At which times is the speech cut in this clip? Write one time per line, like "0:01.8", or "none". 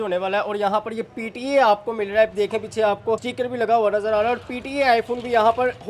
0:03.3